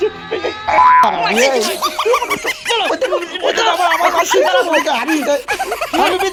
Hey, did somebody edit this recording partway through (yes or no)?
no